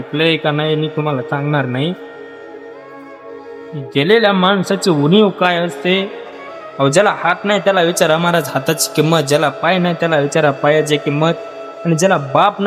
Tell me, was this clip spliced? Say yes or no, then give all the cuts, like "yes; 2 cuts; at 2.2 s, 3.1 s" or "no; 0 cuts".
no; 0 cuts